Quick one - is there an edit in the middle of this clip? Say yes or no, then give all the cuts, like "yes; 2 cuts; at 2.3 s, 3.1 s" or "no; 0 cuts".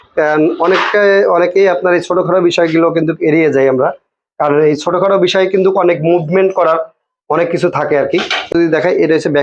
yes; 1 cut; at 8.5 s